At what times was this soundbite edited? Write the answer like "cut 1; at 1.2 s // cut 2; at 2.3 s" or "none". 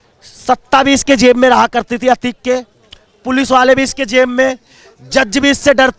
none

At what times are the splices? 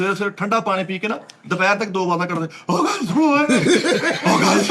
none

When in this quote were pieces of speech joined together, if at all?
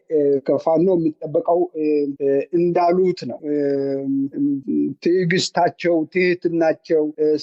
none

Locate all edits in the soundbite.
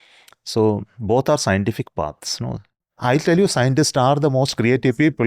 cut 1; at 2.9 s

